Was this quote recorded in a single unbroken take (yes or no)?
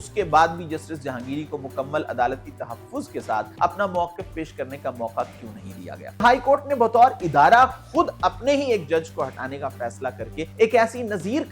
no